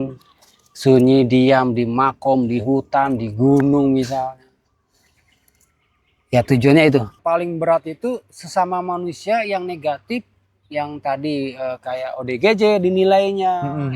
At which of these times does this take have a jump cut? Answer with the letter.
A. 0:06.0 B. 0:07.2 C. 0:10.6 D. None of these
B